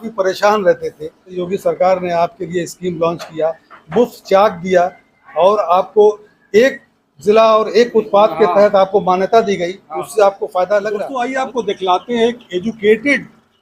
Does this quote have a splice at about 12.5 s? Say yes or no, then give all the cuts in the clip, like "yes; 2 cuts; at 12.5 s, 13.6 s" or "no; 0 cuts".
no; 2 cuts; at 1.3 s, 11.1 s